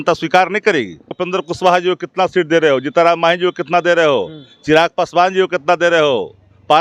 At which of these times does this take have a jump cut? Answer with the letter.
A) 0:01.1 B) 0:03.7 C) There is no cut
A